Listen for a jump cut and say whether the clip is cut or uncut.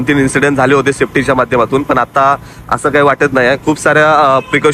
uncut